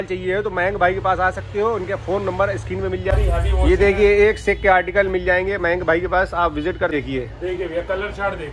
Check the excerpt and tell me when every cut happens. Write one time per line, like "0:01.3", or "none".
0:03.1
0:06.9